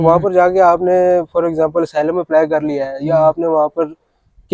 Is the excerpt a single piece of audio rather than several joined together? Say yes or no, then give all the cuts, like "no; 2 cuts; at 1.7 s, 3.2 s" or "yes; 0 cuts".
yes; 0 cuts